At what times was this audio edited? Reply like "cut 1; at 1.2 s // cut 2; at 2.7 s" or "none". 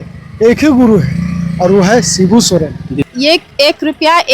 cut 1; at 3.0 s